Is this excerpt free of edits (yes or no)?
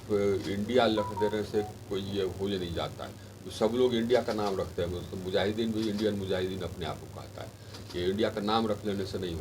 yes